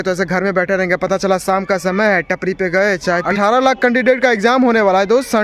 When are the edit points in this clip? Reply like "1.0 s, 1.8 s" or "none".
3.3 s